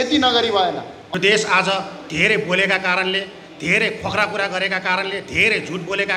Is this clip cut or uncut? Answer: cut